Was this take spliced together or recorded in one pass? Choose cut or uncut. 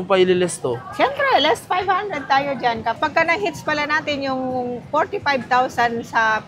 cut